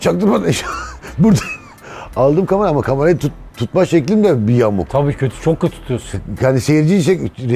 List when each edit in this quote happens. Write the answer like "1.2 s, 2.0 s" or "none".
none